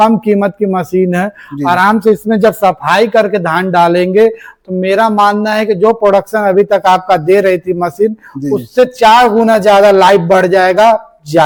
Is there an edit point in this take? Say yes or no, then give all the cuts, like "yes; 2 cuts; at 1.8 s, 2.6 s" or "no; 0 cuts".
no; 0 cuts